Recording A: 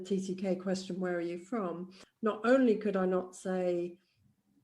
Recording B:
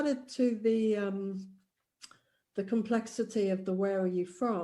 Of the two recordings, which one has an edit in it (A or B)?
A